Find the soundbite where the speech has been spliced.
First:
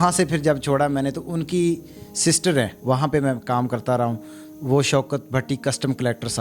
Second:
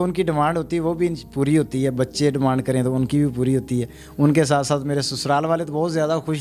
first; 1 cut; at 2.8 s

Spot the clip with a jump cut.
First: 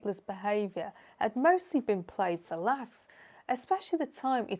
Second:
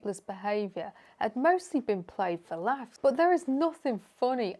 second; 1 cut; at 2.9 s

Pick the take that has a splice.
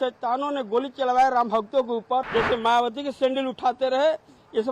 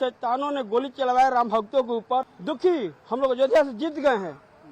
first; 1 cut; at 2.3 s

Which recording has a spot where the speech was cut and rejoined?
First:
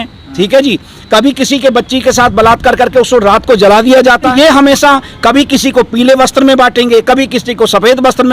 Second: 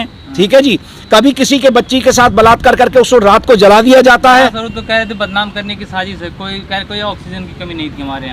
first; 1 cut; at 4.3 s

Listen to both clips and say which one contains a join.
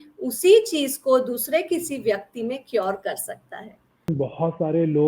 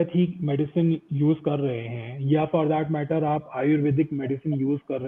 first; 1 cut; at 4.1 s

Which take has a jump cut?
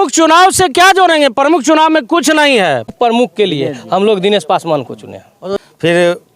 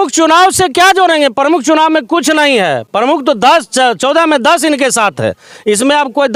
first; 2 cuts; at 2.9 s, 5.6 s

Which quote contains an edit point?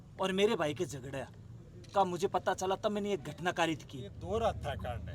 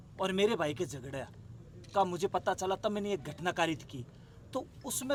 first; 1 cut; at 4.2 s

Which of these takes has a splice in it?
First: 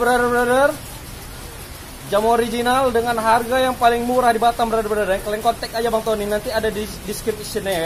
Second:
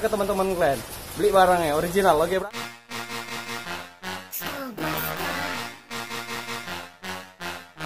second; 1 cut; at 2.4 s

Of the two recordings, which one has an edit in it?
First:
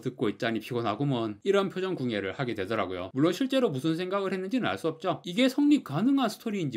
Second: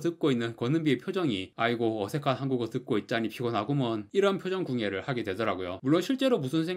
first; 1 cut; at 5.2 s

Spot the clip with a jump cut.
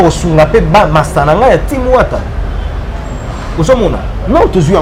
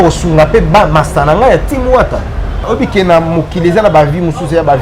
second; 1 cut; at 2.6 s

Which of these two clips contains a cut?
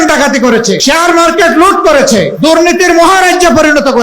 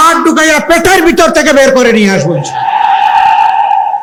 first; 2 cuts; at 0.8 s, 2.3 s

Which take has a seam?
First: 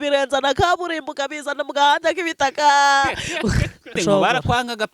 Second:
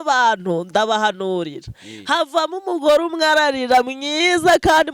first; 1 cut; at 4.0 s

